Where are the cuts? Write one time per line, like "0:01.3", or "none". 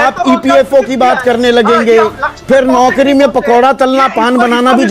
none